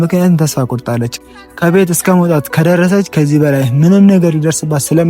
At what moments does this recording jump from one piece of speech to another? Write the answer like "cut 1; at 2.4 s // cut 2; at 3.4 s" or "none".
cut 1; at 1.1 s